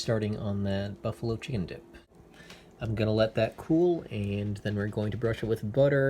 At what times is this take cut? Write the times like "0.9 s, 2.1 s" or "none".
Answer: 2.1 s

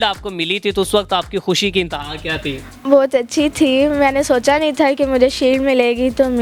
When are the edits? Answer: none

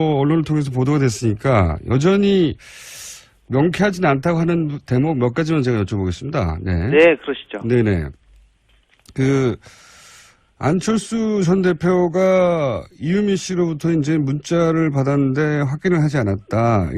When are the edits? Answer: 8.9 s

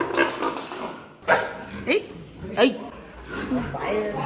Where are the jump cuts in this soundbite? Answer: 1.1 s

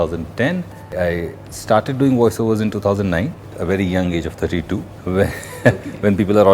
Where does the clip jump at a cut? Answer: 0.9 s, 3.5 s, 4.9 s

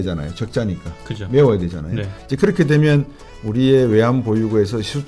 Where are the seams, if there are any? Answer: none

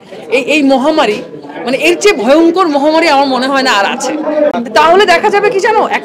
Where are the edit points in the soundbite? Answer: 4.5 s

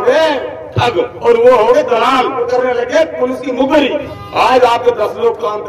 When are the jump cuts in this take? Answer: 1.1 s, 2.5 s, 4.1 s

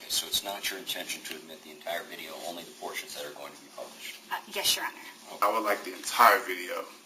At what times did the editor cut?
5.4 s

